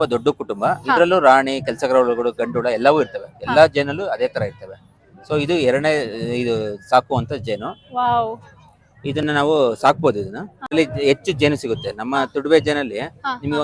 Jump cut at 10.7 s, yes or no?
yes